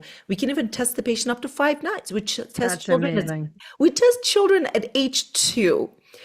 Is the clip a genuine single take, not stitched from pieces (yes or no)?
yes